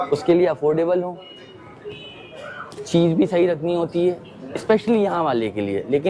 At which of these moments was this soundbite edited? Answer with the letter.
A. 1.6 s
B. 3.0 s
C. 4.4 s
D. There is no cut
D